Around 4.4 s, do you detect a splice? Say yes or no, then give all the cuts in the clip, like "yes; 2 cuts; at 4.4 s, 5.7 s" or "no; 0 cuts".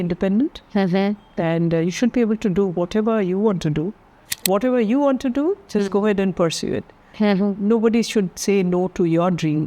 yes; 1 cut; at 4.4 s